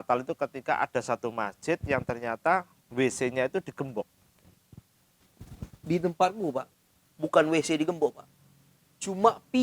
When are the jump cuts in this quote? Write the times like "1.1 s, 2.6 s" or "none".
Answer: none

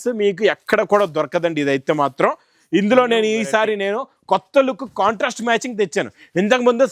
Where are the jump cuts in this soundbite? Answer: none

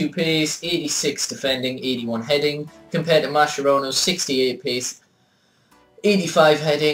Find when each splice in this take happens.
5.0 s

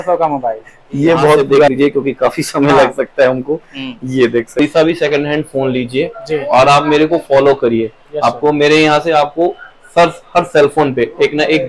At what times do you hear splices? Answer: 1.7 s, 4.6 s

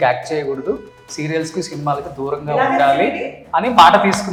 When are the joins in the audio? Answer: none

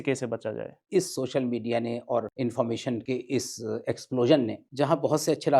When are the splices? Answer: 0.8 s, 2.3 s, 3.0 s, 4.6 s

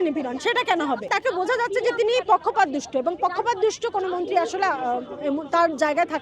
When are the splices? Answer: 1.1 s

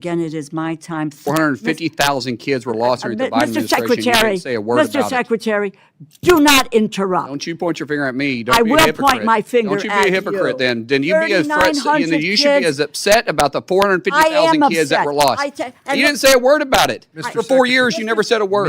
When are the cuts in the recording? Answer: 1.2 s

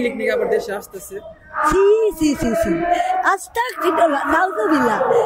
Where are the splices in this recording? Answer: none

